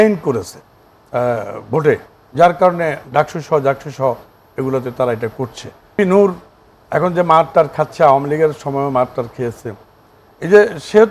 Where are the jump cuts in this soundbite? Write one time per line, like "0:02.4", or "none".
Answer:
0:06.0

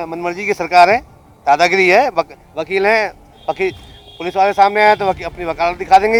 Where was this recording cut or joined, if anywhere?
none

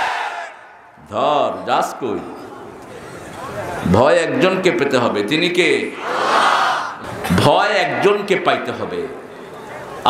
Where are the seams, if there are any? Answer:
0:06.9

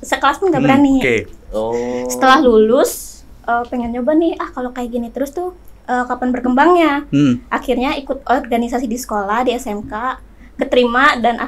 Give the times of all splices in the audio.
none

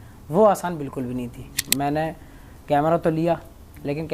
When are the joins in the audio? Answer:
0:01.6

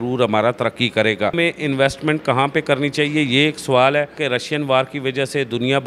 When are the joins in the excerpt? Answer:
0:01.4
0:04.1

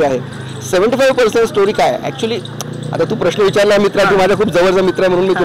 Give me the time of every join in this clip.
none

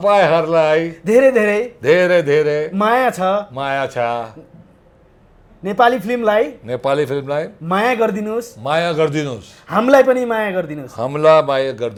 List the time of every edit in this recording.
none

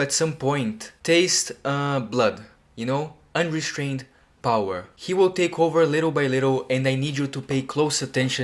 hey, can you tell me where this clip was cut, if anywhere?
0:00.9
0:04.9

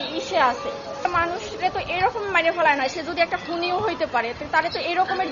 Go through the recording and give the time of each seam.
0:01.0

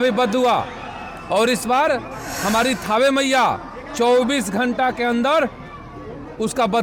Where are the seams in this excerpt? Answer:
none

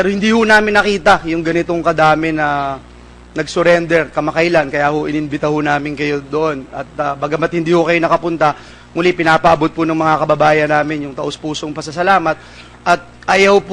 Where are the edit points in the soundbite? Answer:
none

